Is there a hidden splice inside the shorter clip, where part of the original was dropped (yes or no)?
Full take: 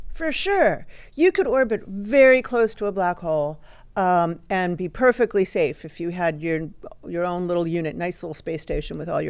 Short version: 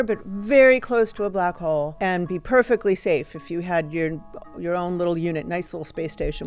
yes